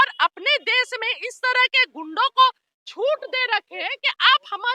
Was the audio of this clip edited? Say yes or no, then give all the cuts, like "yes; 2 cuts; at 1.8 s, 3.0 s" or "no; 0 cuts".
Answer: no; 0 cuts